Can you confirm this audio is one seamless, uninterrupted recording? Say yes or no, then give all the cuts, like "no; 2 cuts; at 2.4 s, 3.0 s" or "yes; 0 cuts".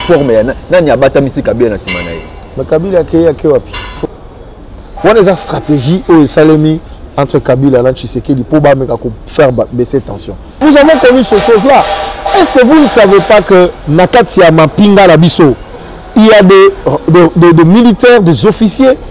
no; 2 cuts; at 4.0 s, 10.5 s